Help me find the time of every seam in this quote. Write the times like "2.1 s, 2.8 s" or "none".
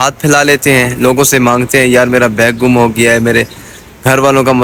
none

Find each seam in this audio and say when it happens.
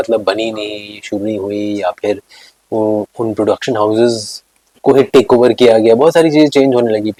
none

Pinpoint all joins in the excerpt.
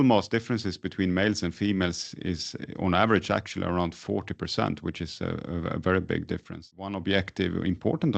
6.7 s

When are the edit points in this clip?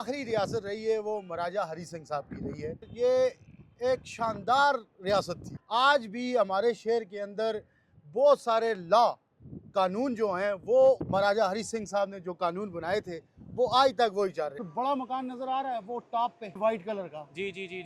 2.8 s, 5.5 s, 11.0 s, 14.6 s, 16.6 s

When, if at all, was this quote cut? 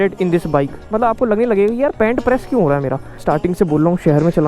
0.9 s, 3.1 s

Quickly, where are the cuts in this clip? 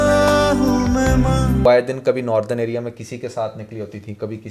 1.6 s

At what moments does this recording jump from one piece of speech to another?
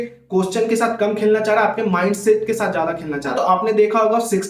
3.3 s

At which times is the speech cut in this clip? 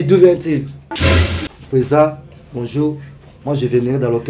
none

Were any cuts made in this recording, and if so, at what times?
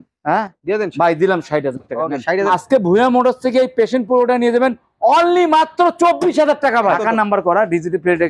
2.4 s, 7.0 s

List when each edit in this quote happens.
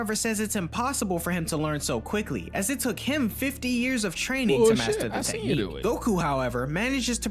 none

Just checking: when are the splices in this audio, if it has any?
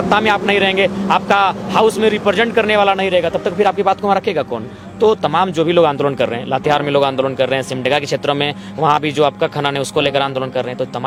none

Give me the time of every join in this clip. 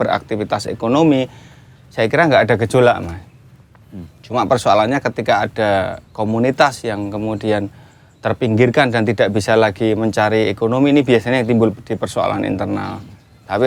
none

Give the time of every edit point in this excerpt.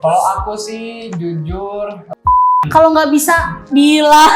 2.5 s

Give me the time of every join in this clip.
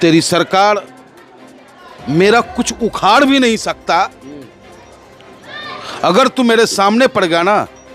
none

